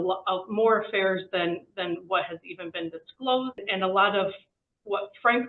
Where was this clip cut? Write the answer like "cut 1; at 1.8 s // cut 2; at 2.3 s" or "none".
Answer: cut 1; at 3.6 s

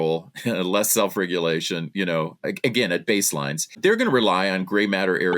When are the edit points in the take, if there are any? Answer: cut 1; at 3.7 s

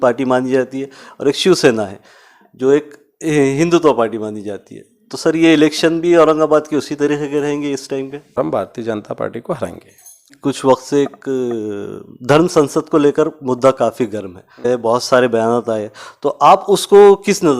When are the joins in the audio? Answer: cut 1; at 8.3 s // cut 2; at 10.3 s // cut 3; at 14.6 s

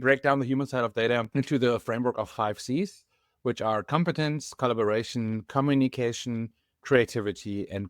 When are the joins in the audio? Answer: cut 1; at 1.3 s

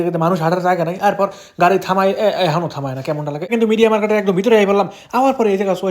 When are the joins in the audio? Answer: cut 1; at 3.5 s

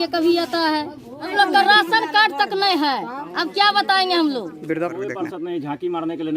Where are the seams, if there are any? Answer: cut 1; at 1.3 s // cut 2; at 4.9 s

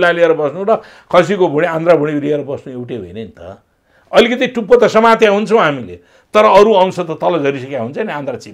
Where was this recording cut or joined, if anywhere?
none

